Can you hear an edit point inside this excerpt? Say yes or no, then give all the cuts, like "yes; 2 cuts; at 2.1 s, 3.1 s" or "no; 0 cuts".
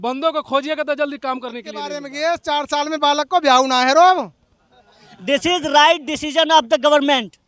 yes; 1 cut; at 2.0 s